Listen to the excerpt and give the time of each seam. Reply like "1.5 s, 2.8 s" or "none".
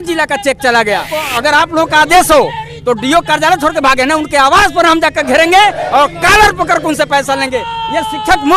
1.2 s